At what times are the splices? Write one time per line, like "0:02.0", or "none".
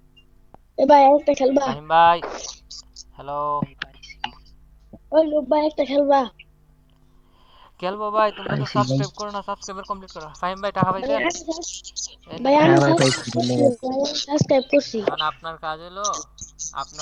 none